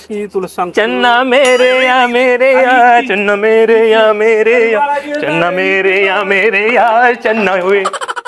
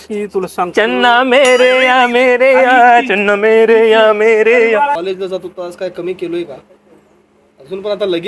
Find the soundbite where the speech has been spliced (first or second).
second